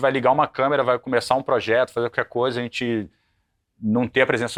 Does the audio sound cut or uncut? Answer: uncut